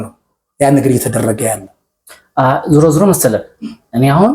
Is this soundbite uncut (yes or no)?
yes